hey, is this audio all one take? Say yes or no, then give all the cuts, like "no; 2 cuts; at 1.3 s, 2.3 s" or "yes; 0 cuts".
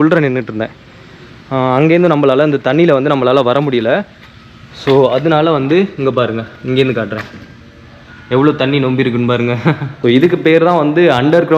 no; 1 cut; at 9.9 s